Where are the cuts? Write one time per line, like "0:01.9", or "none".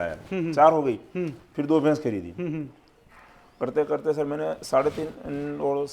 none